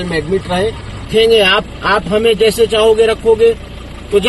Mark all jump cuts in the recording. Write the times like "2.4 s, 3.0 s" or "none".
0.9 s